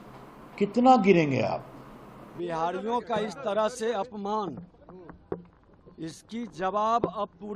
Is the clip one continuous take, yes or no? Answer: no